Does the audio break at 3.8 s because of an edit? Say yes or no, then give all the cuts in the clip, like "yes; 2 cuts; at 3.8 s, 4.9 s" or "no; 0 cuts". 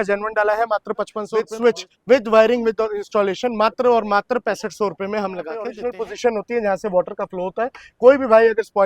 no; 2 cuts; at 1.4 s, 5.8 s